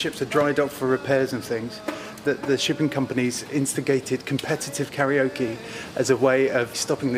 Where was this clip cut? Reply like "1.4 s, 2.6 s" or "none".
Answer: 2.2 s